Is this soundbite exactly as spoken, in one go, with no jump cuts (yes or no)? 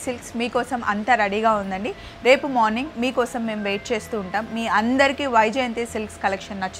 yes